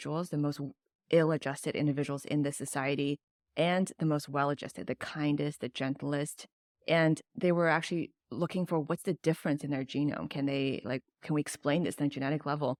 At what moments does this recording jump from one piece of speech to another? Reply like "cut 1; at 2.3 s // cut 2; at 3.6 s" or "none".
none